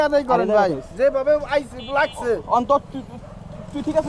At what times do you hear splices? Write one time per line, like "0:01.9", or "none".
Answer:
none